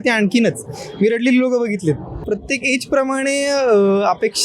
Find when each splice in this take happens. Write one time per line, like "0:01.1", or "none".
0:02.2